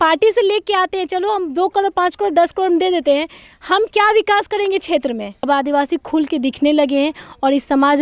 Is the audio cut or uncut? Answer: cut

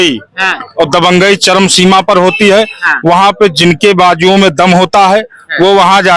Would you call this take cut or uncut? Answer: uncut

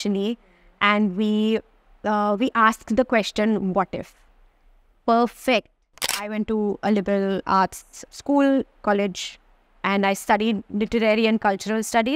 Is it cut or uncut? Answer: cut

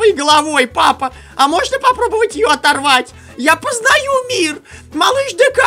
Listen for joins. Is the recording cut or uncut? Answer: uncut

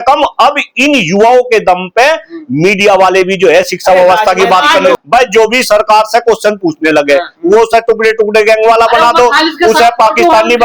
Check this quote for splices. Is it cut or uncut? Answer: cut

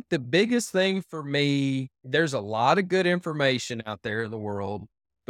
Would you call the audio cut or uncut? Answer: cut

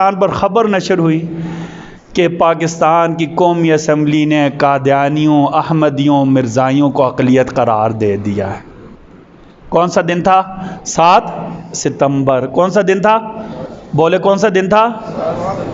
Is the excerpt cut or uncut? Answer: uncut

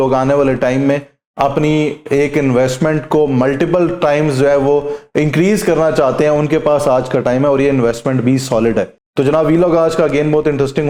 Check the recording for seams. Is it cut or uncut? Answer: uncut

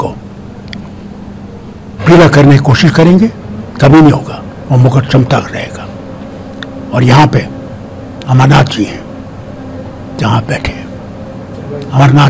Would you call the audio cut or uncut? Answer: uncut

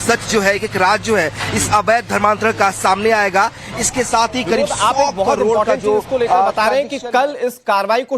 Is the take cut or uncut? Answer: cut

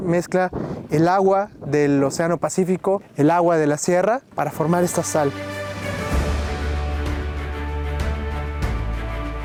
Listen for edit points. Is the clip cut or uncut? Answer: uncut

